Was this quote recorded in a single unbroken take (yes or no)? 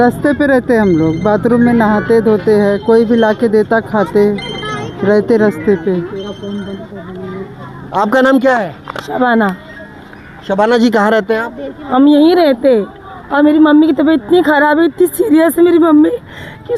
yes